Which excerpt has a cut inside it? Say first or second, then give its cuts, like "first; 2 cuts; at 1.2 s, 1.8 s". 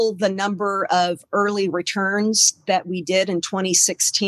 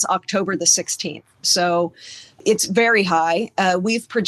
second; 1 cut; at 2.4 s